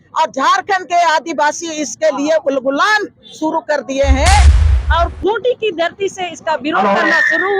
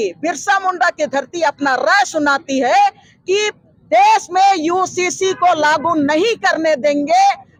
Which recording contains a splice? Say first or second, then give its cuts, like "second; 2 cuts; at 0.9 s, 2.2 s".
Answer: first; 1 cut; at 4.6 s